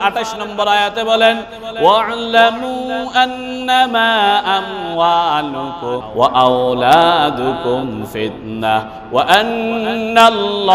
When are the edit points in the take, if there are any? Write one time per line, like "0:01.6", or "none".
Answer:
0:06.1